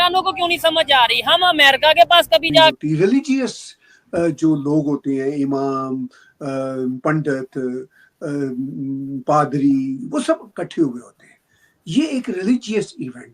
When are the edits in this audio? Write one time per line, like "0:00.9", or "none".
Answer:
0:02.7

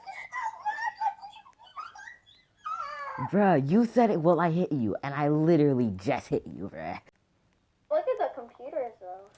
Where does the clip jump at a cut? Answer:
0:07.0

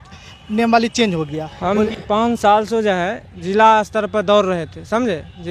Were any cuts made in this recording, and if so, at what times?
0:01.4

